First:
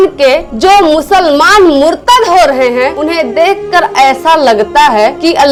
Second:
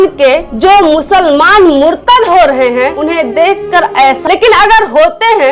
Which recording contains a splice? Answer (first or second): second